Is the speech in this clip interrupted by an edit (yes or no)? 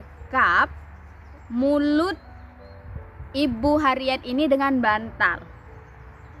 no